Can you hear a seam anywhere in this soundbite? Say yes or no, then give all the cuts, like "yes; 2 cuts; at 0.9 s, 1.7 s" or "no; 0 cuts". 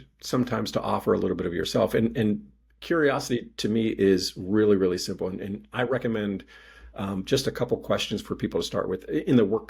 no; 0 cuts